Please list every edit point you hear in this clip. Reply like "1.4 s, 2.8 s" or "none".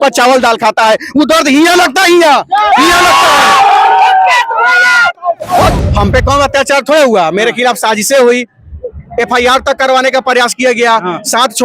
5.7 s